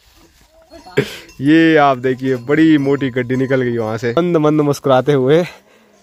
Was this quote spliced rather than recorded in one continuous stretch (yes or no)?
yes